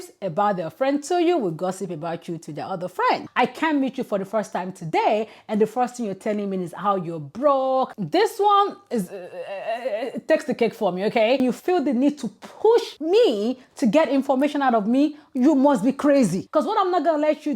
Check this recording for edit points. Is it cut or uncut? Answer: cut